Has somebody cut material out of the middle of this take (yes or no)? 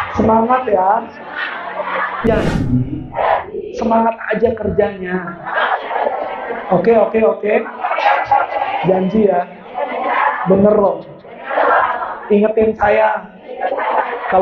yes